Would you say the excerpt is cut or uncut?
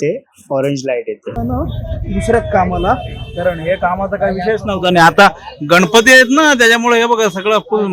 cut